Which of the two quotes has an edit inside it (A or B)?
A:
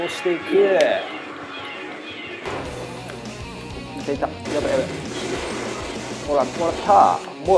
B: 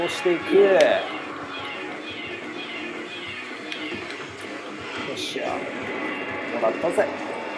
A